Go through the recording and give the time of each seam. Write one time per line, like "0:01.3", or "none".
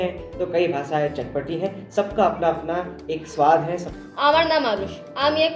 0:03.9